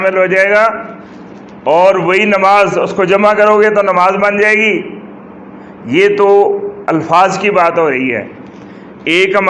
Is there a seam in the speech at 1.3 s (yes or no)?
no